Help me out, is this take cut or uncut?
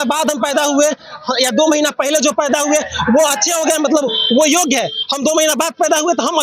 uncut